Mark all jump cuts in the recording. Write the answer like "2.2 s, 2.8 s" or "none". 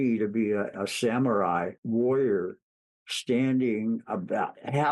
0.7 s, 1.8 s